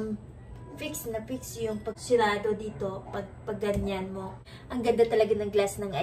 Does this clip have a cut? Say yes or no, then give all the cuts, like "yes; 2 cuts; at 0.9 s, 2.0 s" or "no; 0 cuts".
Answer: yes; 2 cuts; at 2.0 s, 4.5 s